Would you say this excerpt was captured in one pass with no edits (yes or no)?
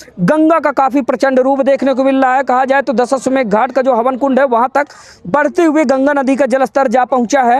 yes